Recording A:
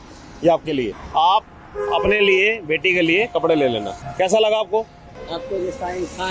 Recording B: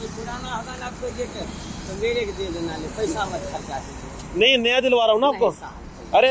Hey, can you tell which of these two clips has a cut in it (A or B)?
A